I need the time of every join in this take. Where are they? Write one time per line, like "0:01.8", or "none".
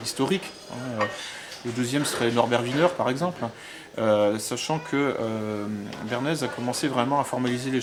none